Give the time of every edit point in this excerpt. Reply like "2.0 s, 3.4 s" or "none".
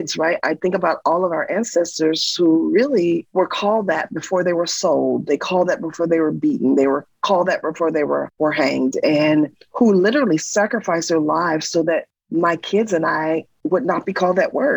none